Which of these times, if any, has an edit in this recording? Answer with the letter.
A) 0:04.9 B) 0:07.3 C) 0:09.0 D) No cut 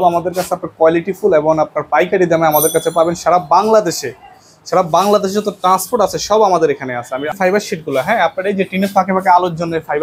B